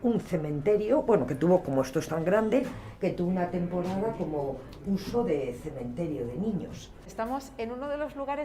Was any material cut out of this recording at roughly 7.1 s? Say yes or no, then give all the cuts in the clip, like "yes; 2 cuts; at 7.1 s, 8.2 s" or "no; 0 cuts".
yes; 1 cut; at 7.1 s